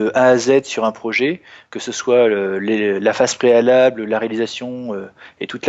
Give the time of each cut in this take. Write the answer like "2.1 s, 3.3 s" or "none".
none